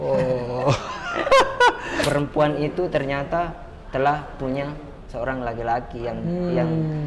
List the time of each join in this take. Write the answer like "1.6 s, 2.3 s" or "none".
2.0 s